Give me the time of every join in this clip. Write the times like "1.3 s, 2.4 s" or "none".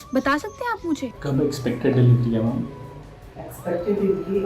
none